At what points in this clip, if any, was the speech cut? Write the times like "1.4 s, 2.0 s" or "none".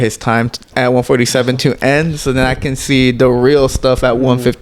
none